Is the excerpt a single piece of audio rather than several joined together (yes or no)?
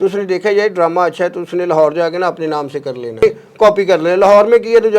no